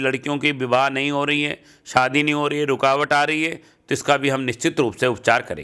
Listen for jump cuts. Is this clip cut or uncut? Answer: uncut